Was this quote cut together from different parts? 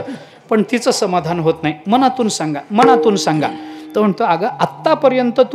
no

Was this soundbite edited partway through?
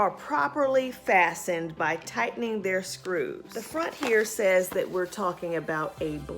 yes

